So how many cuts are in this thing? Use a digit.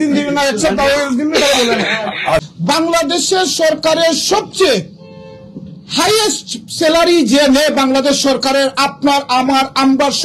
1